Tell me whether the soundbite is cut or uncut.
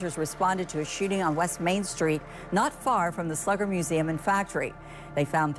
uncut